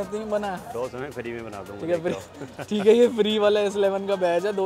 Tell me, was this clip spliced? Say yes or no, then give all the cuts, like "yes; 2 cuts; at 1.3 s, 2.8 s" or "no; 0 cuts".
no; 0 cuts